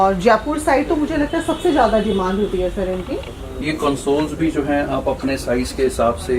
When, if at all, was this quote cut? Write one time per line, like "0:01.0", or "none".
0:03.6